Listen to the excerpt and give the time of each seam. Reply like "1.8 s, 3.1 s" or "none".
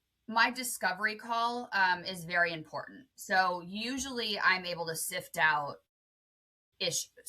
none